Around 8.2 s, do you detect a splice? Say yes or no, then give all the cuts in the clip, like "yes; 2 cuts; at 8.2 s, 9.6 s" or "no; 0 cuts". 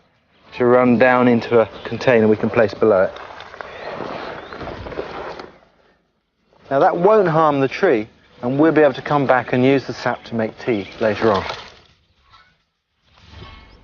no; 1 cut; at 12.8 s